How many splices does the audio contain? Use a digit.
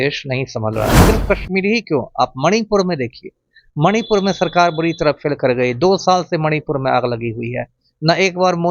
1